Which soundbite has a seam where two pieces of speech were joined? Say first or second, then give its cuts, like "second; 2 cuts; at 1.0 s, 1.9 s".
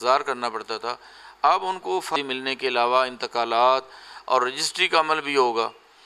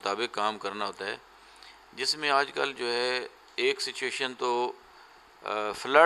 first; 1 cut; at 2.1 s